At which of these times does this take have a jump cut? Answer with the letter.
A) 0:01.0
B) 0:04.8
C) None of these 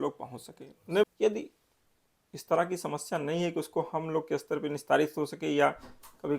A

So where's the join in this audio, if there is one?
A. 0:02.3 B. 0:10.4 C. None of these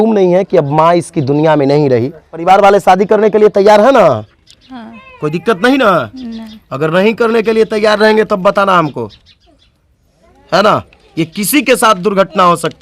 A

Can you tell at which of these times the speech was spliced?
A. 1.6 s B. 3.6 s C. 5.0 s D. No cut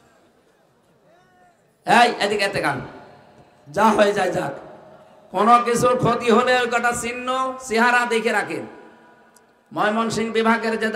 D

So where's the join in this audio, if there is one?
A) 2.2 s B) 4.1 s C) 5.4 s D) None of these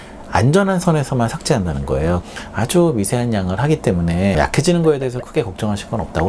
A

